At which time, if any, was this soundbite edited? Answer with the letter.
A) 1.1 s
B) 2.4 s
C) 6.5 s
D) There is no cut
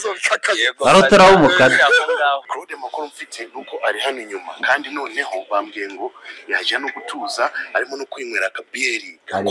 B